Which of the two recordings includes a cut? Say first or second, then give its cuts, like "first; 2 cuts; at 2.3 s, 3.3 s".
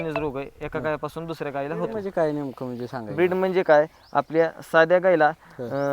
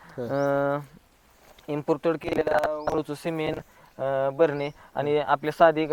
first; 1 cut; at 2.0 s